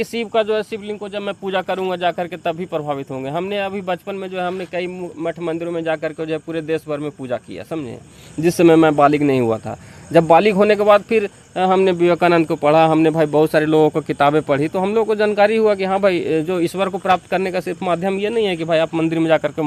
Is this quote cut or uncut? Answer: uncut